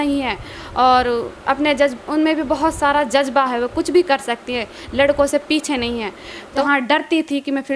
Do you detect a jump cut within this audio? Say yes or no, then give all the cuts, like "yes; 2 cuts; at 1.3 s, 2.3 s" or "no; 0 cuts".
yes; 1 cut; at 6.6 s